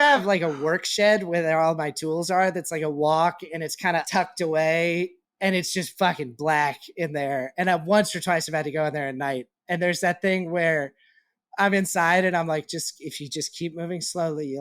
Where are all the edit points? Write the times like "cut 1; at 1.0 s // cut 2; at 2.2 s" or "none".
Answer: none